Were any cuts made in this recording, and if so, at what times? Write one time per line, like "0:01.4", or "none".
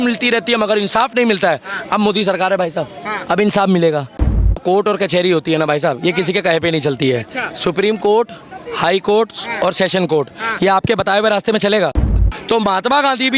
0:04.6
0:12.0